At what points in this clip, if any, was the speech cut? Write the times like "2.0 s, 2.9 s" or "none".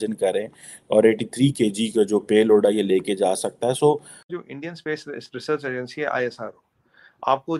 4.2 s

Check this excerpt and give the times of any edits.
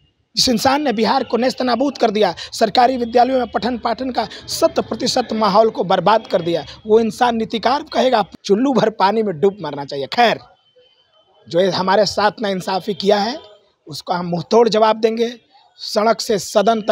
8.3 s

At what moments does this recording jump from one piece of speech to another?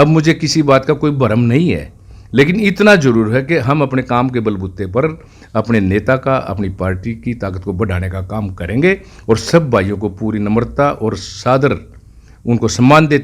none

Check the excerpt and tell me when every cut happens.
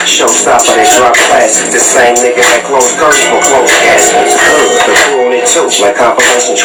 none

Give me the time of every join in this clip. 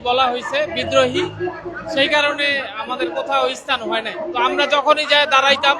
4.2 s

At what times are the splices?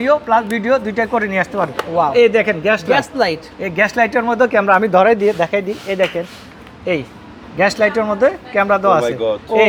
none

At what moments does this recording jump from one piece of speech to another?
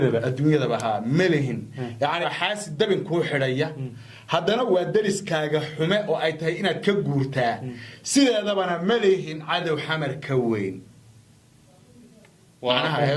2.3 s

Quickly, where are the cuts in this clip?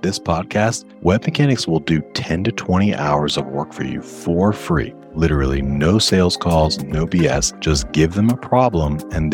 0.9 s, 5.0 s, 7.5 s

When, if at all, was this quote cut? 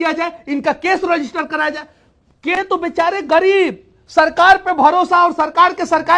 2.6 s

